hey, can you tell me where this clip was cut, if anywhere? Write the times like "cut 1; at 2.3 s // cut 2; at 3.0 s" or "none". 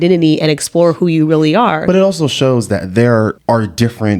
cut 1; at 1.8 s // cut 2; at 3.4 s

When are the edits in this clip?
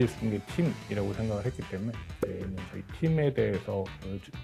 none

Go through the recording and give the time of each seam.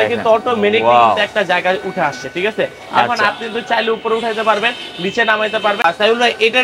none

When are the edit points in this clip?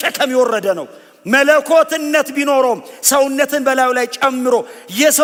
none

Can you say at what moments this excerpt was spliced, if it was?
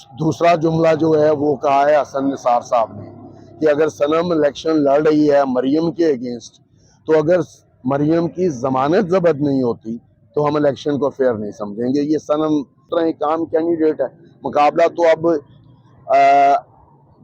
cut 1; at 12.8 s

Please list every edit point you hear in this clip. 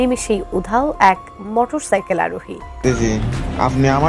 cut 1; at 2.8 s

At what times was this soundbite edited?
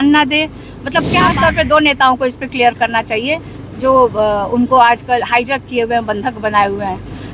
cut 1; at 1.3 s

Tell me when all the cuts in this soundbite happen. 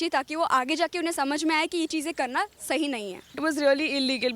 cut 1; at 3.4 s

